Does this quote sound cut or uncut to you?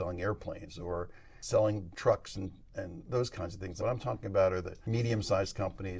cut